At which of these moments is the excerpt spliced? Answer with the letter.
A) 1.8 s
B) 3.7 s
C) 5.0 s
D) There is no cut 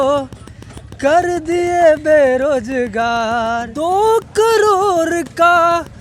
B